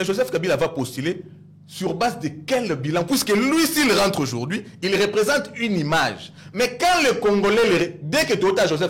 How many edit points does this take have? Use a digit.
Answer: 0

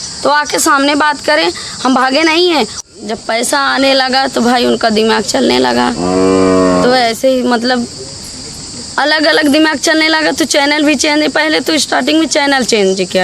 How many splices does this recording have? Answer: 1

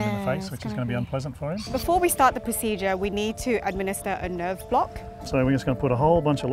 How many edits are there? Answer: 1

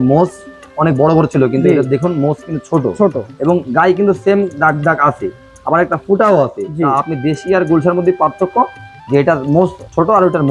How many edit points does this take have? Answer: 0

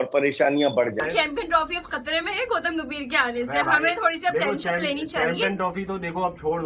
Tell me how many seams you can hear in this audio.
1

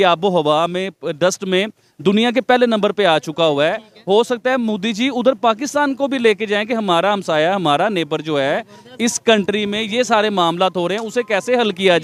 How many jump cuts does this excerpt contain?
0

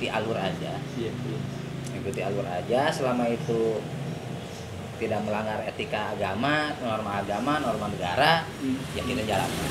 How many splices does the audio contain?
0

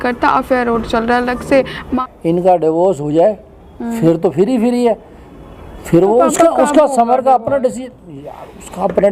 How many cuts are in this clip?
1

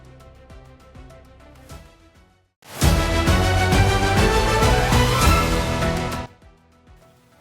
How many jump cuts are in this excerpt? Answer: 1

